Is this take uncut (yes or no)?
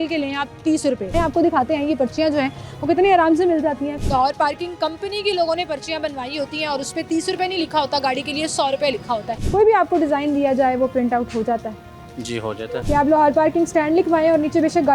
no